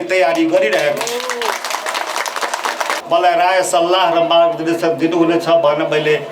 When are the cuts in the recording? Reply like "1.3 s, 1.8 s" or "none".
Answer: 3.0 s